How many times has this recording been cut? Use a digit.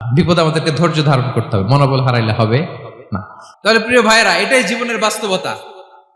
1